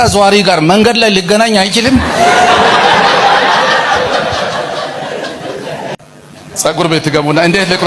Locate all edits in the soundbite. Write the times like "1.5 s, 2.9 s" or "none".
6.0 s